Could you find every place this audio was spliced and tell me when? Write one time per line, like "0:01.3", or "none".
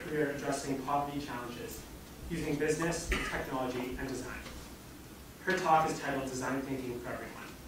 none